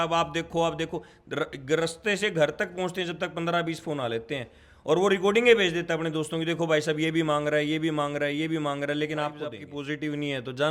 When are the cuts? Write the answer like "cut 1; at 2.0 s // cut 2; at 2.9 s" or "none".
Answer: cut 1; at 9.7 s